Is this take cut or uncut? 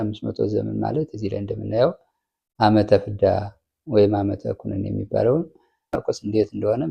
cut